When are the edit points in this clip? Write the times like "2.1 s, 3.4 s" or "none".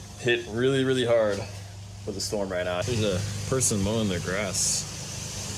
2.8 s